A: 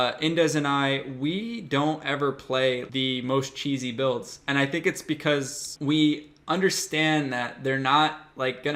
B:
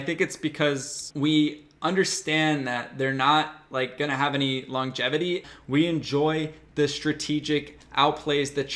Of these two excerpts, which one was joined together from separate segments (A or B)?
B